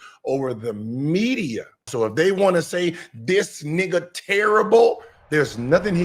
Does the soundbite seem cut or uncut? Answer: cut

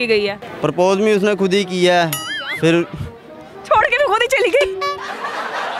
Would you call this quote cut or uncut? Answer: uncut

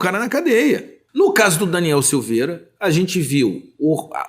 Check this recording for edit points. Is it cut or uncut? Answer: cut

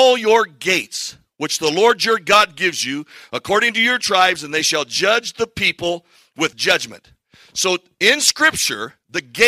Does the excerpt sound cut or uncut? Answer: cut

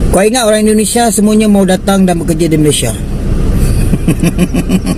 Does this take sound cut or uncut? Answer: uncut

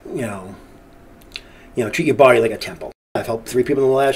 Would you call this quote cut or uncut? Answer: cut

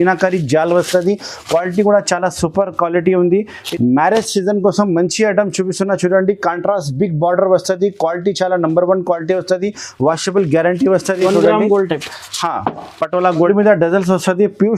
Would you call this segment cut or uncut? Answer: cut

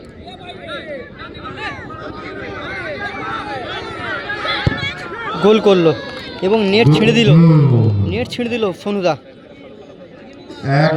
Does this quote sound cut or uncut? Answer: uncut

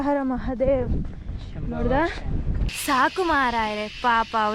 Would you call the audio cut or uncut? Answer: cut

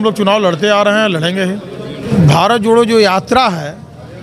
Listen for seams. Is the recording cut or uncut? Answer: cut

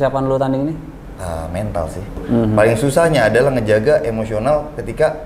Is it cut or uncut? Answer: cut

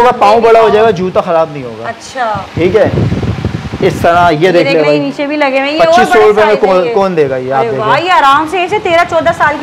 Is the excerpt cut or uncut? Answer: uncut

